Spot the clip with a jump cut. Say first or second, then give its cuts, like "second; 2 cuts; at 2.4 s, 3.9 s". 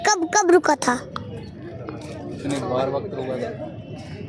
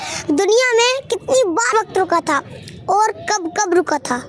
second; 1 cut; at 1.7 s